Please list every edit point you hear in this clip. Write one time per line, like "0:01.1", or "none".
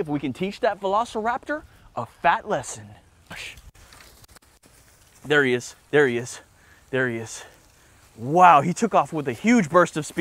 0:03.3